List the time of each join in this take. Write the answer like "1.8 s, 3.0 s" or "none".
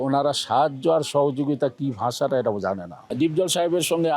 3.1 s